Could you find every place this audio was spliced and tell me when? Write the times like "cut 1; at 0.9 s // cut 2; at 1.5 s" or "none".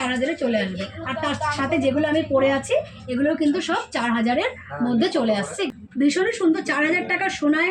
cut 1; at 5.6 s